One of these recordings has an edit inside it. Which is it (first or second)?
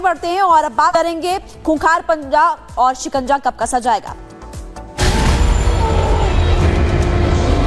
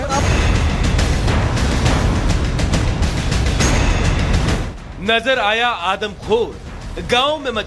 first